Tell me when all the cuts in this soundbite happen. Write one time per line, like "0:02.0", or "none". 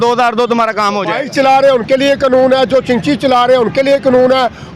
0:01.2